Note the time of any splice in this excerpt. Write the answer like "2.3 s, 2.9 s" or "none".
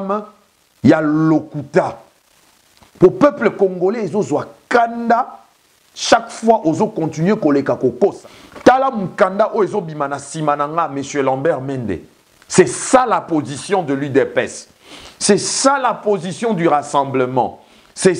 8.2 s